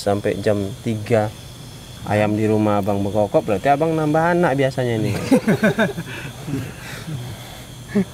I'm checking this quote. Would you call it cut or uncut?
uncut